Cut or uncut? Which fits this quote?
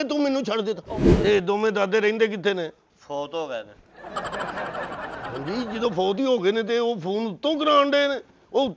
cut